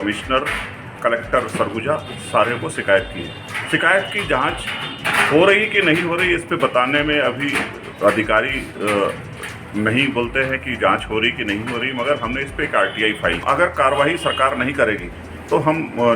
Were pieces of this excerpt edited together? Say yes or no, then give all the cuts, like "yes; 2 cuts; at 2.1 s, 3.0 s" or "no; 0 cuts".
yes; 1 cut; at 13.4 s